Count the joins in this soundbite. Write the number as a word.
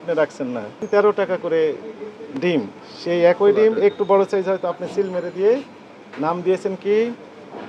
one